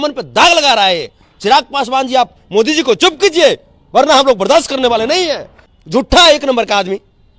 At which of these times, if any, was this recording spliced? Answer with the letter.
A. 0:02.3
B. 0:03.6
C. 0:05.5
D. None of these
C